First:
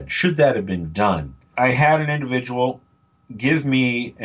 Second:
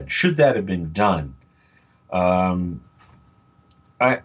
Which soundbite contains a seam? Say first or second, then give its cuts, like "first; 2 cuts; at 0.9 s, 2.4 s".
first; 1 cut; at 1.5 s